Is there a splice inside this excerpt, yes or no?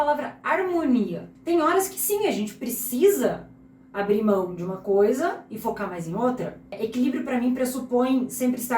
yes